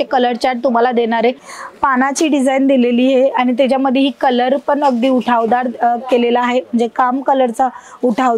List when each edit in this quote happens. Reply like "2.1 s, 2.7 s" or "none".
1.5 s